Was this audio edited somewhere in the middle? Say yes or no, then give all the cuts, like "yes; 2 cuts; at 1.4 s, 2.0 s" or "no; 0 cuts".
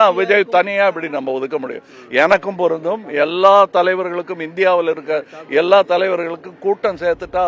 no; 0 cuts